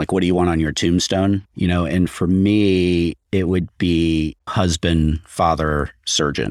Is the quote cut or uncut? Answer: cut